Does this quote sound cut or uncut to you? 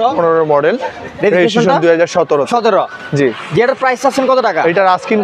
uncut